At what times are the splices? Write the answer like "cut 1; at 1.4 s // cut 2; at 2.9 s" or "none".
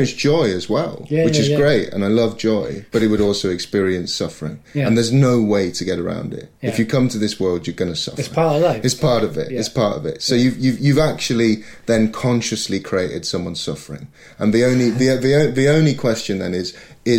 none